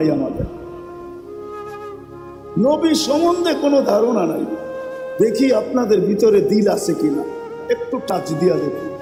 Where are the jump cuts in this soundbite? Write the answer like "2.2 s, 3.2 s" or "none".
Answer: none